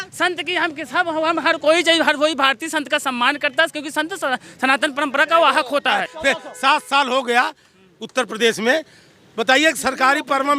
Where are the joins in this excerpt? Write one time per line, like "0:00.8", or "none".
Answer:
0:06.1